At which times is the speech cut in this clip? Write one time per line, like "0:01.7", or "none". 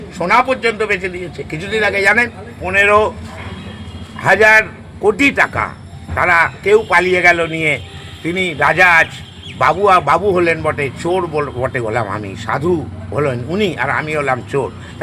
0:02.5